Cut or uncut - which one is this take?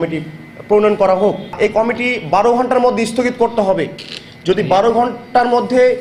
cut